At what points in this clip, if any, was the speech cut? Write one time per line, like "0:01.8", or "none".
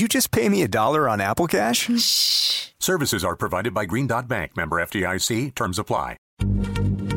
0:06.3

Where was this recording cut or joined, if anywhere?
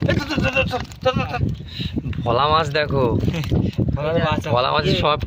0:01.3

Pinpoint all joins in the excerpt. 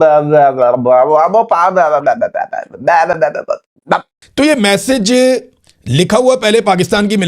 0:04.2

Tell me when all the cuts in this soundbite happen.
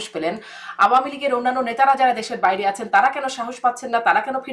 none

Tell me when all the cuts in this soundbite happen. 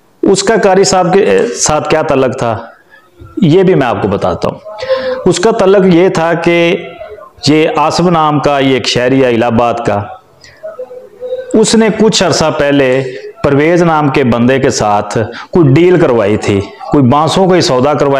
none

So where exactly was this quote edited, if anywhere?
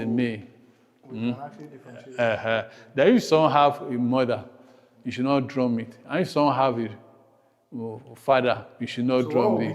none

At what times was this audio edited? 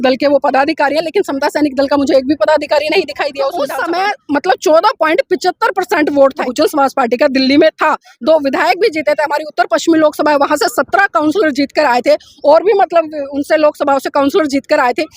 0:03.6
0:06.4

